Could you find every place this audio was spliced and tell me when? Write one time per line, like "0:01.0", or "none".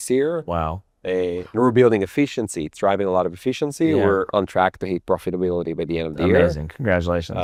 none